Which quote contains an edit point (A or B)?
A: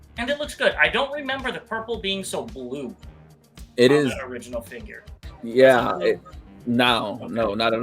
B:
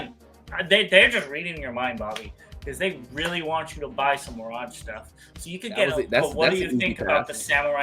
B